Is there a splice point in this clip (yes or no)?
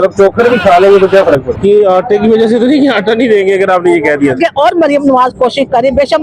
yes